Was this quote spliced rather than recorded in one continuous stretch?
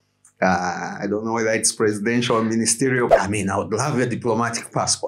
yes; 1 cut; at 3.1 s

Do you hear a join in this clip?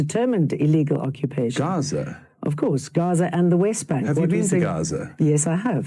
no; 0 cuts

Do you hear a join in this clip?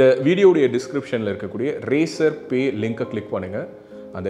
no; 0 cuts

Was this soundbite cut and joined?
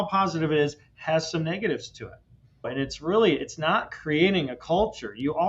yes; 1 cut; at 2.7 s

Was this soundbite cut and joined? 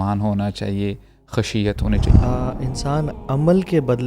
yes; 1 cut; at 2.1 s

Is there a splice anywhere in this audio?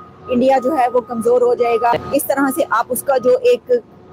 yes; 1 cut; at 1.9 s

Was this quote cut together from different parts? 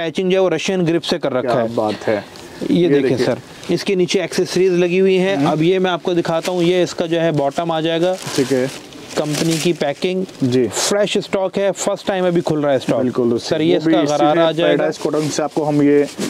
no; 0 cuts

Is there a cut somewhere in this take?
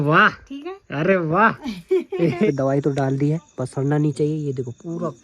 yes; 1 cut; at 2.4 s

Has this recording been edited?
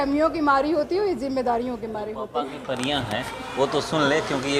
yes; 1 cut; at 2.5 s

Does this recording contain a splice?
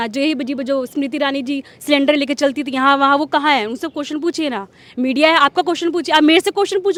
no; 0 cuts

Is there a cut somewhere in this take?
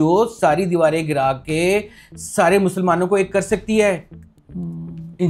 no; 0 cuts

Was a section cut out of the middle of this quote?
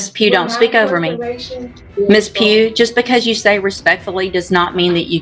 yes; 1 cut; at 1.8 s

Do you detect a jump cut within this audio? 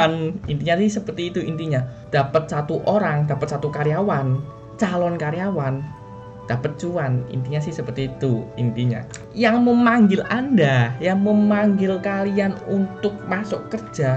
yes; 2 cuts; at 2.0 s, 9.2 s

